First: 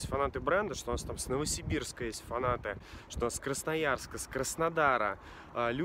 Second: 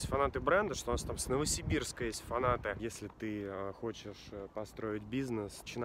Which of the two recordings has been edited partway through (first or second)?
second